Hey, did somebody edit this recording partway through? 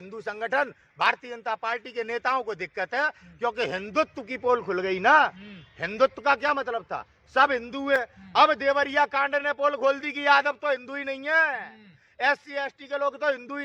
no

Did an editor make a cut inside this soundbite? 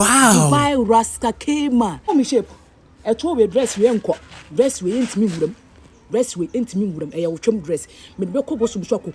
yes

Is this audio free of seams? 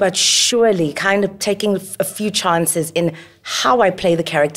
yes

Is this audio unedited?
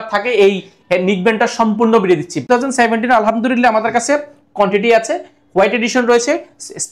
no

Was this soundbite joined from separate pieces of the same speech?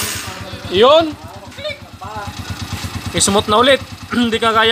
no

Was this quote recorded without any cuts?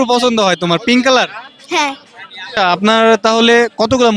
no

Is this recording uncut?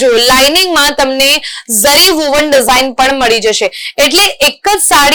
yes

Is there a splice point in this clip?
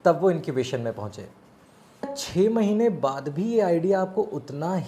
yes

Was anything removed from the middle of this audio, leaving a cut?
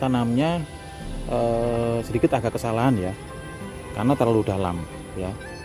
no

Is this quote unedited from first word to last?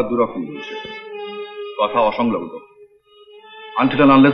yes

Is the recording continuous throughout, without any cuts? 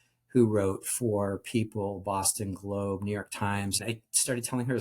no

